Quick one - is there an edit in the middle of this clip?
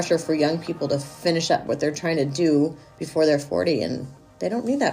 no; 0 cuts

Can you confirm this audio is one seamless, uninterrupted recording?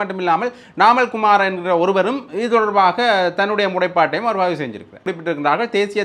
no; 1 cut; at 5.1 s

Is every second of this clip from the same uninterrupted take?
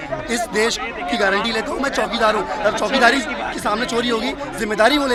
yes; 0 cuts

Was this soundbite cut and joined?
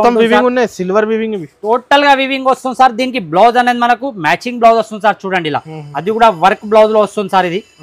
no; 0 cuts

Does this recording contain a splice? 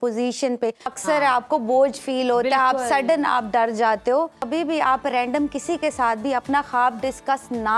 yes; 2 cuts; at 0.9 s, 4.5 s

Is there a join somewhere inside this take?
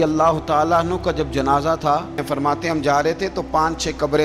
yes; 1 cut; at 2.2 s

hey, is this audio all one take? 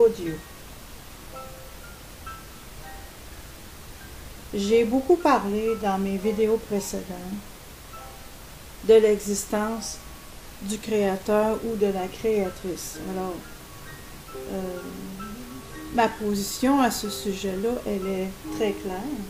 yes; 0 cuts

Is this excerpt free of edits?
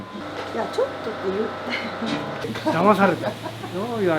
no; 1 cut; at 2.4 s

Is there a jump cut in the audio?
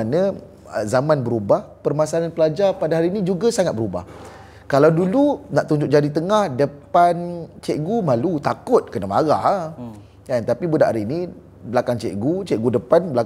no; 0 cuts

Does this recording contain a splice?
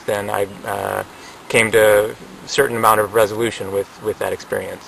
no; 0 cuts

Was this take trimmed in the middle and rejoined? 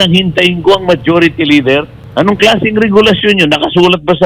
yes; 1 cut; at 2.0 s

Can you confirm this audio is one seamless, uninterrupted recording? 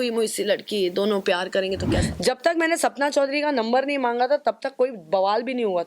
no; 1 cut; at 2.0 s

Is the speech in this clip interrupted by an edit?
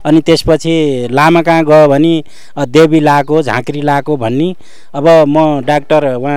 no; 0 cuts

